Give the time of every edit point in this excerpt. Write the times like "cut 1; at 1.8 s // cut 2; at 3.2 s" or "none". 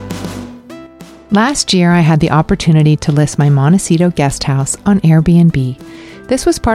none